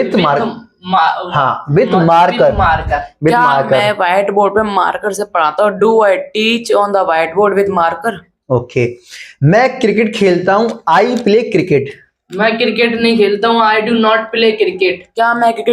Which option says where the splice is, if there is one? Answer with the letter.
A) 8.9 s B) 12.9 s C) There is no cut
C